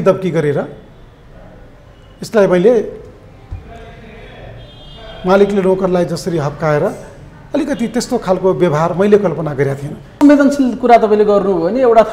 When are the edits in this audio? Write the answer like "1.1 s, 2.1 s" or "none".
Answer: 10.2 s